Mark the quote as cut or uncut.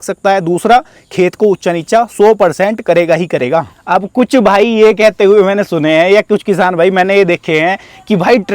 cut